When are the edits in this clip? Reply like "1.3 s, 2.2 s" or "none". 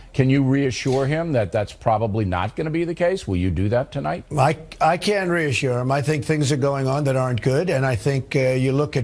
none

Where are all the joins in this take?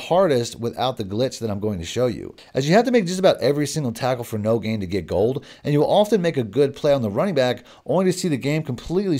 none

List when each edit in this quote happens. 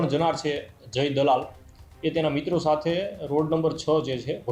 none

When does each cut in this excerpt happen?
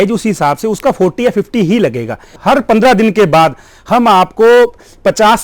2.3 s

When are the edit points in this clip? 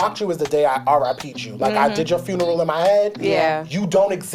none

